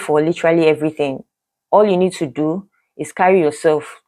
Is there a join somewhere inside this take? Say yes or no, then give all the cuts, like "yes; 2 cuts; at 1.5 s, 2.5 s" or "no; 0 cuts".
no; 0 cuts